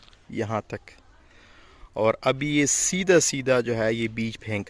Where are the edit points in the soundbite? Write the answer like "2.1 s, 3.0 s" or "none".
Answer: none